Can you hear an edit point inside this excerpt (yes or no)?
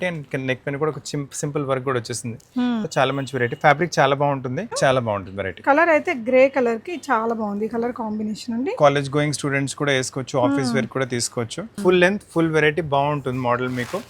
yes